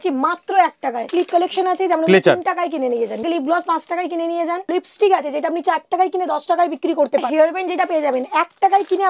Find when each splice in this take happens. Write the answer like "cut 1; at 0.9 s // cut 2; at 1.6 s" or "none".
cut 1; at 1.1 s // cut 2; at 3.2 s // cut 3; at 4.7 s // cut 4; at 7.3 s